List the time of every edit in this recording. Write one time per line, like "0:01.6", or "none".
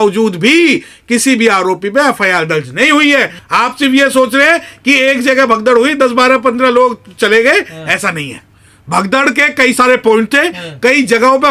0:03.4